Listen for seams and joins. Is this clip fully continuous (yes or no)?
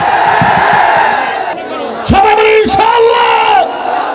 no